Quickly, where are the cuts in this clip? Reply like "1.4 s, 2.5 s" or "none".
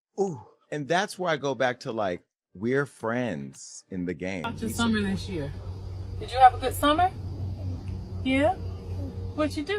4.4 s